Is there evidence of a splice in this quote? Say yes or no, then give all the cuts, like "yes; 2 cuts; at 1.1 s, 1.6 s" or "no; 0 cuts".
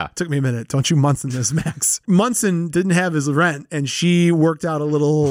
yes; 1 cut; at 2.0 s